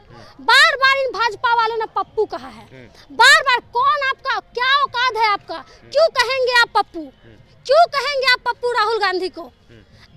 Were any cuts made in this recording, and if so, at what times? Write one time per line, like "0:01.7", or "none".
none

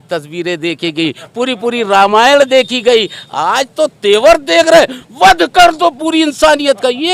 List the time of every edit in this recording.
none

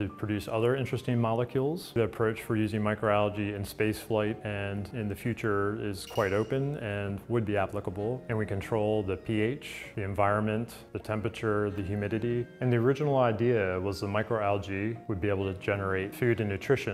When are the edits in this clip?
0:01.9
0:08.2
0:12.5

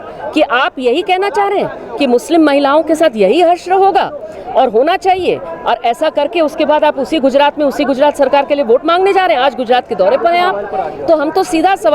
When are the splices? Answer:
none

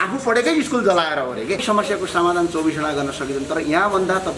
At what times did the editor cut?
0:01.6

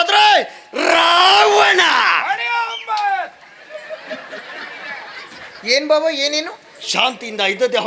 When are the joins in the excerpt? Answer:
none

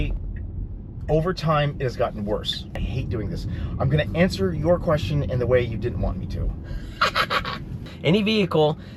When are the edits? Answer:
0:02.7
0:07.8

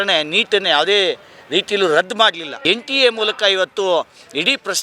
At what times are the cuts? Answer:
0:02.5

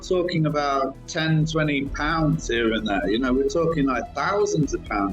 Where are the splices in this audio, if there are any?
0:01.0

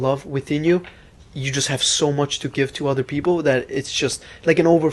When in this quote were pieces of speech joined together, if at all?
none

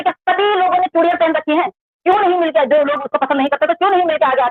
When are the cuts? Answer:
none

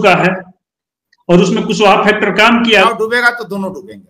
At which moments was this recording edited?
0:02.8

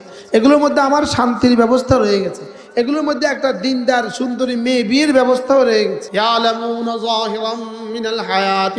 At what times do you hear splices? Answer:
0:06.0

